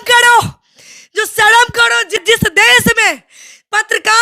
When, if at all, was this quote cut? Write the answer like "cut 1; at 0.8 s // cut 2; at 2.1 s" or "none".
cut 1; at 2.2 s